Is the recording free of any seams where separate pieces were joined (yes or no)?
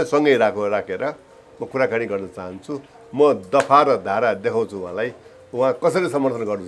yes